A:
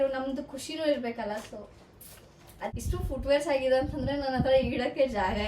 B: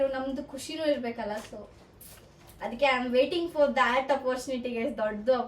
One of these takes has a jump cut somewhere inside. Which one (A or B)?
A